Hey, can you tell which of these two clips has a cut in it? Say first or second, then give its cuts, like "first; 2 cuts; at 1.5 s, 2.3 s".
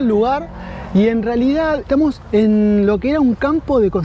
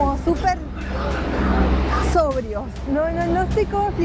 first; 1 cut; at 2.0 s